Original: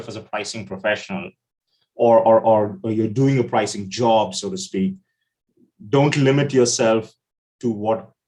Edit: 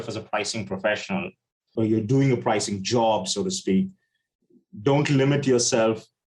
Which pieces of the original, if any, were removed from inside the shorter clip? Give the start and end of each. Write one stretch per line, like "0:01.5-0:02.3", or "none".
0:01.7-0:02.8